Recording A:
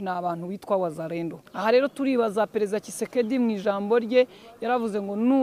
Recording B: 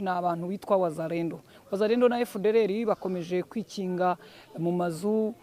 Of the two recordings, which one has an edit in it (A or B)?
A